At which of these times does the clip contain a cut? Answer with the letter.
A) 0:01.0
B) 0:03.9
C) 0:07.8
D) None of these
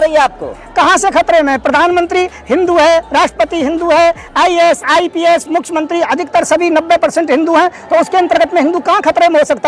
D